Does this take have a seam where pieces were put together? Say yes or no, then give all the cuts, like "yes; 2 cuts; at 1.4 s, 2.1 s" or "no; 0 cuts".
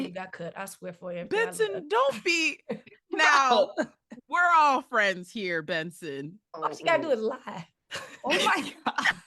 yes; 1 cut; at 6.6 s